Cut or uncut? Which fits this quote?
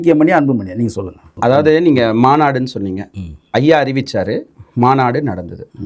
cut